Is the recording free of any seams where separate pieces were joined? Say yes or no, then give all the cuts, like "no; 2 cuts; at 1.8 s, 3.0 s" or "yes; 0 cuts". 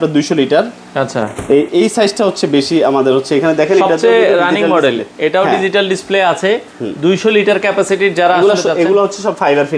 yes; 0 cuts